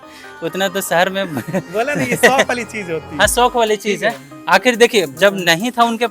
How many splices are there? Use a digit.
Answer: 0